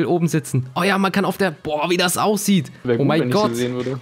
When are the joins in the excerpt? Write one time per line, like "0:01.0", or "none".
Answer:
0:02.7